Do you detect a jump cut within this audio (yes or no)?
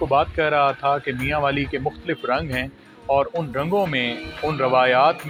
no